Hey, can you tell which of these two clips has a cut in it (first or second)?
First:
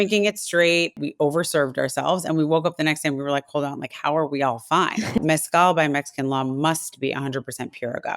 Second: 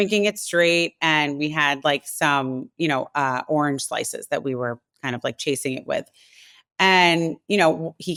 first